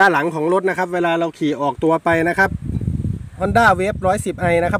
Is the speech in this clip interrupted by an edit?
yes; 1 cut; at 3.3 s

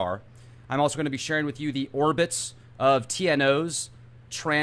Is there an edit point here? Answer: no; 0 cuts

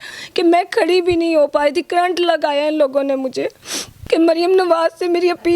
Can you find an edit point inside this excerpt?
yes; 1 cut; at 3.9 s

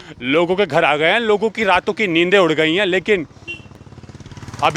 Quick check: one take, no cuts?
yes; 0 cuts

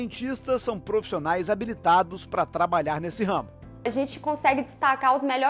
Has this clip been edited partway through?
yes; 1 cut; at 3.8 s

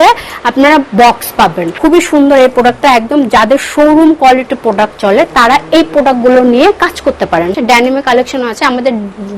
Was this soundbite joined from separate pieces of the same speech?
yes; 2 cuts; at 1.7 s, 7.5 s

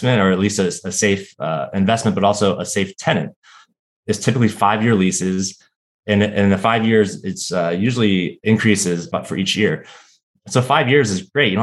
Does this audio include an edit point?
yes; 2 cuts; at 8.4 s, 9.0 s

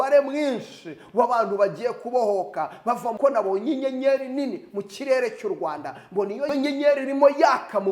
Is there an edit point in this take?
yes; 1 cut; at 3.1 s

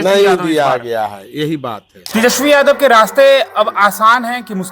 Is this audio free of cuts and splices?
no; 1 cut; at 1.9 s

